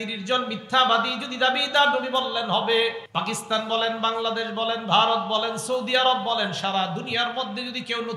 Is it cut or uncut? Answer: cut